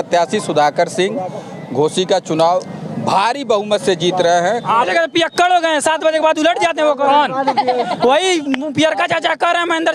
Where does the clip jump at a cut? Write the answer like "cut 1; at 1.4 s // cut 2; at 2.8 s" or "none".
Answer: cut 1; at 4.9 s